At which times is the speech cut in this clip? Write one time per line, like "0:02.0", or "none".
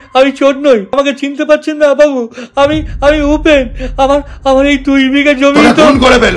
0:00.9